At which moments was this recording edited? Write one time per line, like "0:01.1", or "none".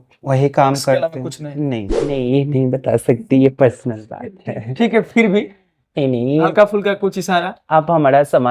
0:02.0